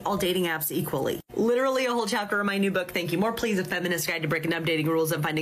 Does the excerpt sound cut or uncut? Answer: uncut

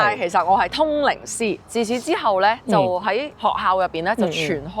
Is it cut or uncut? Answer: cut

